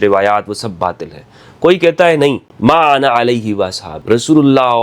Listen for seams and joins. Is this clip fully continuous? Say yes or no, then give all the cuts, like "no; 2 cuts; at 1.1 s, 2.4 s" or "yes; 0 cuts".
no; 2 cuts; at 2.5 s, 3.9 s